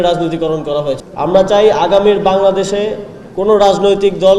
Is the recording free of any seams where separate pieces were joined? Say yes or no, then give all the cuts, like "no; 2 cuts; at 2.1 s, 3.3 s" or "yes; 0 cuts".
no; 1 cut; at 1.0 s